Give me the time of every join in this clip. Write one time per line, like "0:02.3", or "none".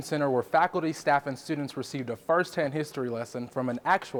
none